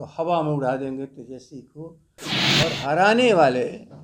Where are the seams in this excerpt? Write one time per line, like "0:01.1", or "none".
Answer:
0:02.4